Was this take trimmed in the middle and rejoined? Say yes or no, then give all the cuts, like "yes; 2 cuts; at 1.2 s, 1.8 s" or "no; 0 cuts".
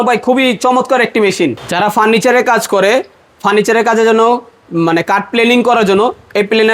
yes; 1 cut; at 1.6 s